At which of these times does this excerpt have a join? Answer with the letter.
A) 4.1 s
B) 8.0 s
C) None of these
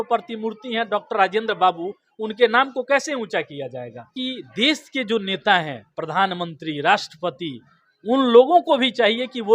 A